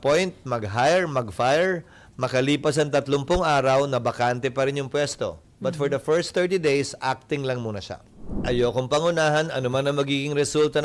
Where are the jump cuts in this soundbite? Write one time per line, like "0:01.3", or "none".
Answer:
0:08.5